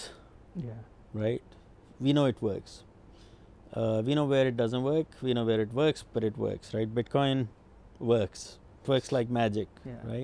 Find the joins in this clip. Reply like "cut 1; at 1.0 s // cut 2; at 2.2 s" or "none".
cut 1; at 8.8 s